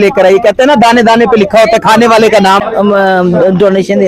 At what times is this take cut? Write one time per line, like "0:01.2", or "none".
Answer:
0:02.7